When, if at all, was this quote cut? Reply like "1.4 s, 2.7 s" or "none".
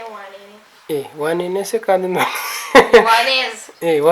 none